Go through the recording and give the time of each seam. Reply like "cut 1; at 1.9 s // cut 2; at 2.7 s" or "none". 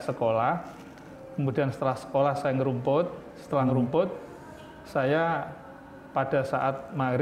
none